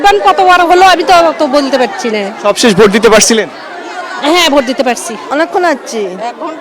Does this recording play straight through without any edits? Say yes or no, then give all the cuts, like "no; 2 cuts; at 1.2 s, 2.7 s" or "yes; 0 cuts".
no; 1 cut; at 5.2 s